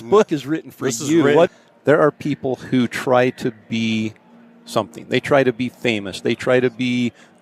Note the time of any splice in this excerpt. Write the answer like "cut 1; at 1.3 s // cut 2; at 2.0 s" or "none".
cut 1; at 1.6 s